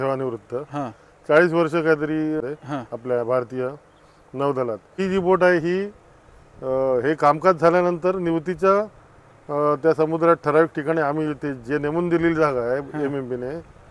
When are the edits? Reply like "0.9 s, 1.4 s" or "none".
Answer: 2.4 s, 5.0 s